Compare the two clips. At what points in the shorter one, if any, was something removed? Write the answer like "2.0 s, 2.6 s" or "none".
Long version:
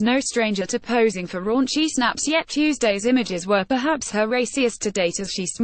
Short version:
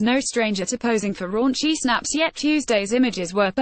1.0 s